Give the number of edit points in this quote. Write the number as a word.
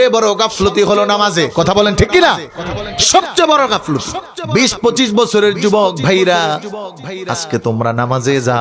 one